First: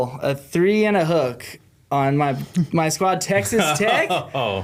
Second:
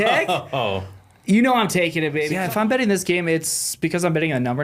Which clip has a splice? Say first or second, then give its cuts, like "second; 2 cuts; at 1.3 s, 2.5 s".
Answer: second; 1 cut; at 2.3 s